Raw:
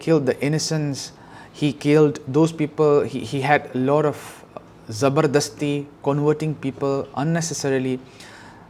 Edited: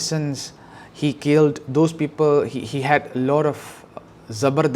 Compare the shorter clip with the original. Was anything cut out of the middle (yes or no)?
no